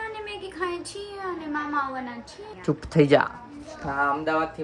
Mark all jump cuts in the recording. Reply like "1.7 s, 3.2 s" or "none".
2.5 s